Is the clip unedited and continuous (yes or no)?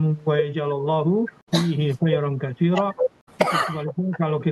no